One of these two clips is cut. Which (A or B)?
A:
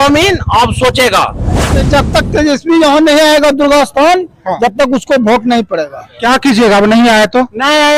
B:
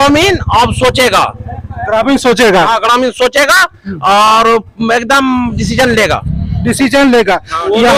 A